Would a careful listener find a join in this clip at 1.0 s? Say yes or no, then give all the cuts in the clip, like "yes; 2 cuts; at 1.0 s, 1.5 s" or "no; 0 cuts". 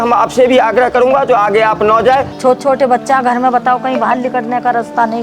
no; 1 cut; at 2.3 s